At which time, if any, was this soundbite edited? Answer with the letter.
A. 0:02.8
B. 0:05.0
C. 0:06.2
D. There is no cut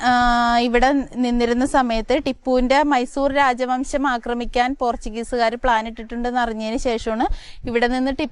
D